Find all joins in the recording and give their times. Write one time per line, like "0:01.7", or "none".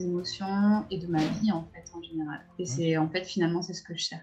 none